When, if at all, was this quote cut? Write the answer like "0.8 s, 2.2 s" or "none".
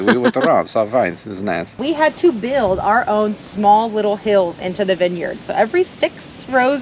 1.7 s